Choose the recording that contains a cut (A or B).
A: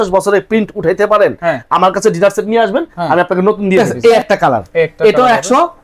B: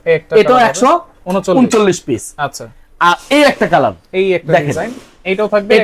A